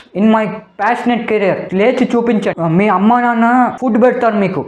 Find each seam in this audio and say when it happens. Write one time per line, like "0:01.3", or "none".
0:02.5